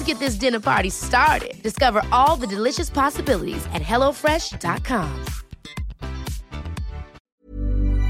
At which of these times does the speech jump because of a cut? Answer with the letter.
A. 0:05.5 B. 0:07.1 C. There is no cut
B